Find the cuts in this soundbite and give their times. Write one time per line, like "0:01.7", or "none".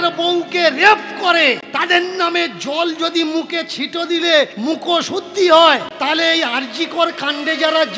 0:01.7
0:04.5
0:05.9